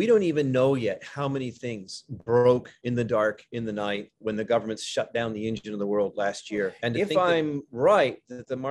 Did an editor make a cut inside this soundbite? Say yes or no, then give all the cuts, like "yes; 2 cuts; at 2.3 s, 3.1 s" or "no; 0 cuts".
yes; 1 cut; at 6.8 s